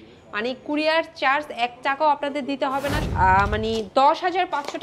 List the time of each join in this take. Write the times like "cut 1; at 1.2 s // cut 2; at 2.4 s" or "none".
cut 1; at 3.0 s

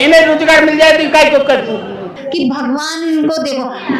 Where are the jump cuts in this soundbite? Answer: cut 1; at 2.2 s

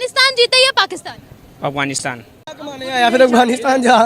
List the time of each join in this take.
cut 1; at 2.4 s

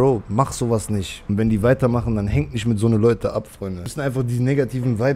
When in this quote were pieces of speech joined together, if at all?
cut 1; at 1.1 s // cut 2; at 3.9 s

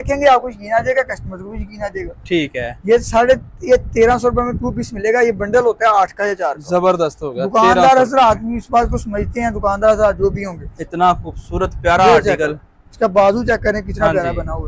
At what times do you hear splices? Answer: none

